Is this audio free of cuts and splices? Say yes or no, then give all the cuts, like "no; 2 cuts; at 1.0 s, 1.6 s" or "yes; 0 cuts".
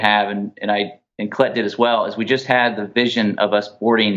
yes; 0 cuts